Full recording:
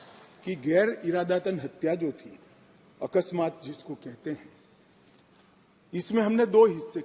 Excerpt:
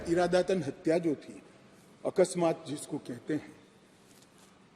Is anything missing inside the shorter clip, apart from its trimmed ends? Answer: no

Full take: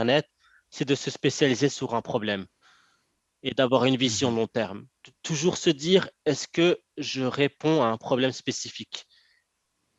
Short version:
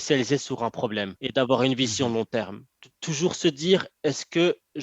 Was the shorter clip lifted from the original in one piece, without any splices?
no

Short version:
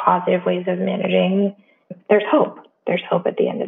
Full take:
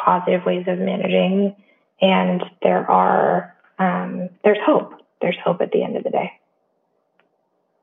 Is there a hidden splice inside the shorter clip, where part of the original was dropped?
yes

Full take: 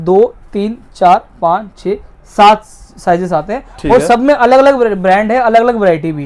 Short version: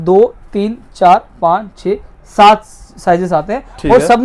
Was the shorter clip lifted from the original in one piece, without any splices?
yes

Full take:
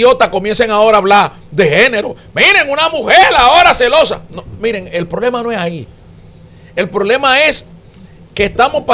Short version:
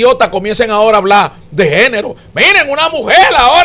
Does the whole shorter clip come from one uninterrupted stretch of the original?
yes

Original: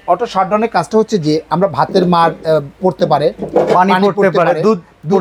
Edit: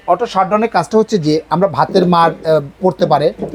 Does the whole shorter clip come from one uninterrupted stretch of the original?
yes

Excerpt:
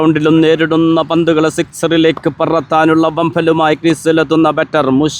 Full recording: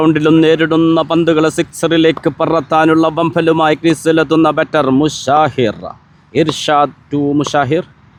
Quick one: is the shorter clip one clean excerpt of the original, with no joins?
yes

